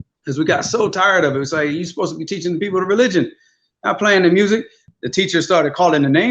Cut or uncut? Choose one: cut